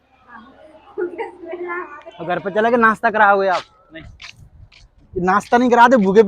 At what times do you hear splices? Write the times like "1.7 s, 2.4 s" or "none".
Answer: 2.1 s